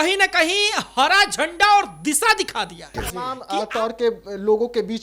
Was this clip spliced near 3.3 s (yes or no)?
yes